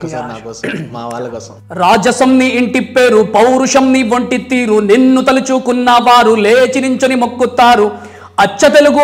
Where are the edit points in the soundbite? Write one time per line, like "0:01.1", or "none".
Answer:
0:01.6

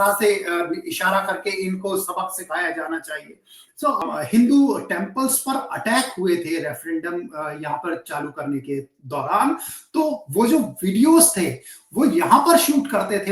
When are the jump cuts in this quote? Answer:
0:04.0

